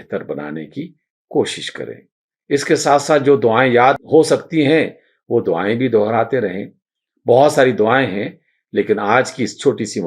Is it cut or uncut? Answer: cut